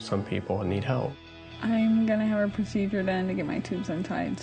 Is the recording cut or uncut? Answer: cut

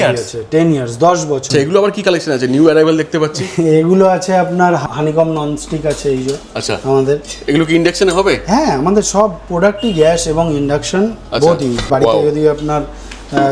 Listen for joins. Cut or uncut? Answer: cut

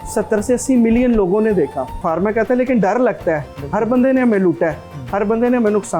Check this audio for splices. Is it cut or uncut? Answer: cut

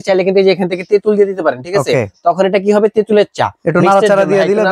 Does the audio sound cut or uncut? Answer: uncut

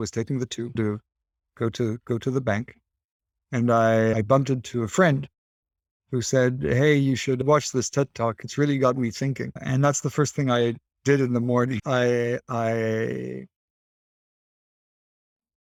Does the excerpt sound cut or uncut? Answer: uncut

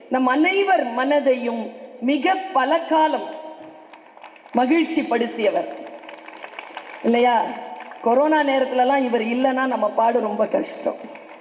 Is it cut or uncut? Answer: uncut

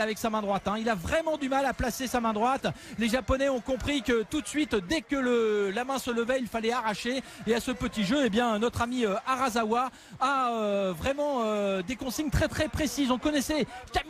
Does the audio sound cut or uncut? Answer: uncut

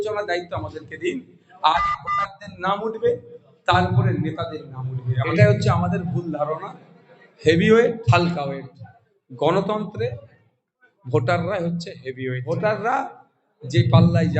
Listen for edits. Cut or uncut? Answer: cut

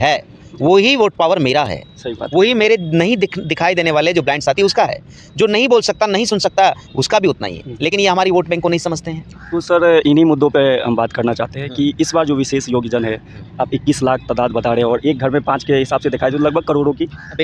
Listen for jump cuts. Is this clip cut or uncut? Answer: uncut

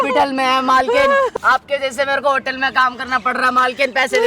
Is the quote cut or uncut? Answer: cut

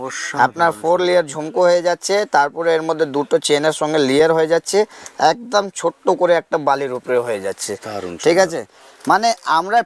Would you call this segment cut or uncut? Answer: uncut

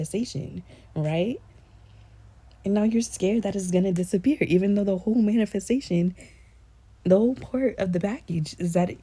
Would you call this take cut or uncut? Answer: uncut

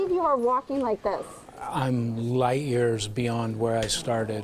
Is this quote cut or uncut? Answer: cut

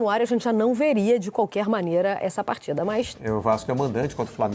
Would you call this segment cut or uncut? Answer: cut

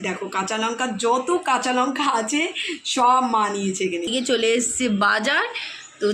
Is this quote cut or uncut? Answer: cut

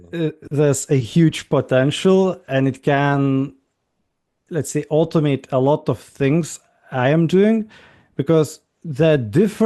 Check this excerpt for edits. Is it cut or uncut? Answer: uncut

